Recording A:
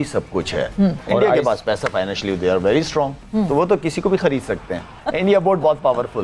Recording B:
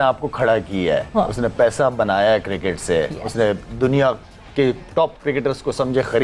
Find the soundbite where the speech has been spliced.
A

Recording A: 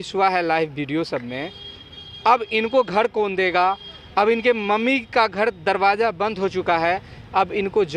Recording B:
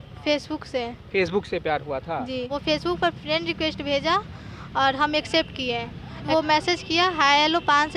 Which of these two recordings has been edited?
B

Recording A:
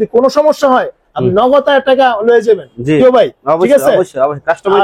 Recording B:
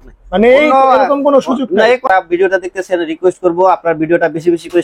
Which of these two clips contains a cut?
B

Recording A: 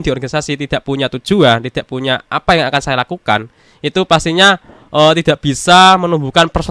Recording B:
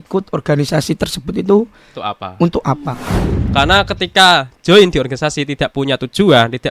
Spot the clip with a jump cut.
B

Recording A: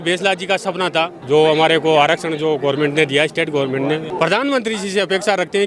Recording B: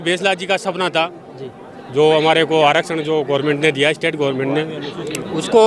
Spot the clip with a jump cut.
A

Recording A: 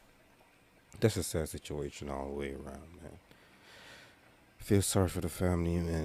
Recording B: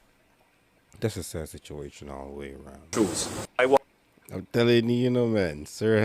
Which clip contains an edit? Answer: B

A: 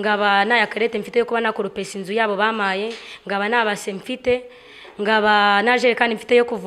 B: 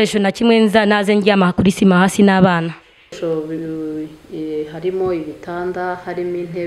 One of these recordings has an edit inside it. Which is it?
B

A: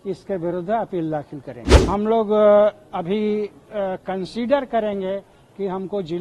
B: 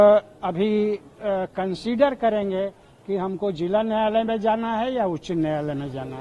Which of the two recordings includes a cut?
A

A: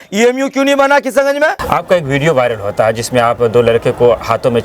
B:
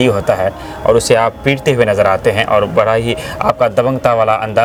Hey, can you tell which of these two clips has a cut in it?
A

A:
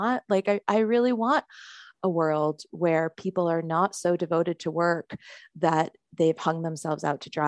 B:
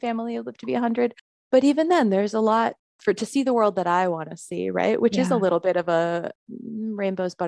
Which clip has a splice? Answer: B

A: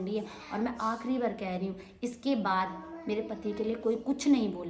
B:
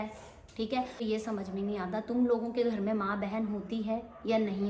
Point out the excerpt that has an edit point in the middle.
B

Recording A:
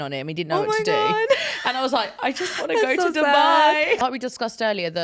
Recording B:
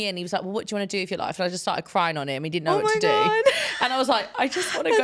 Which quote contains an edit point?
A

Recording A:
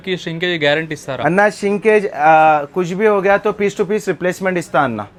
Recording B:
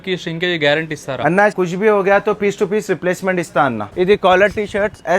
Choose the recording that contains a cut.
B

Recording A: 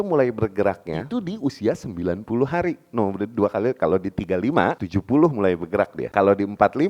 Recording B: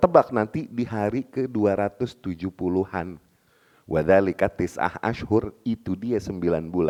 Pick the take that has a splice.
A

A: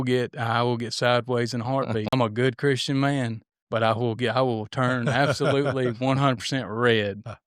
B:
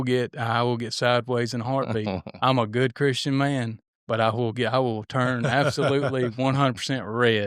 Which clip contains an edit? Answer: A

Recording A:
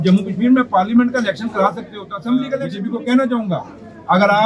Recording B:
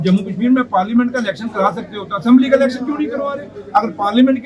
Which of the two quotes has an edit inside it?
A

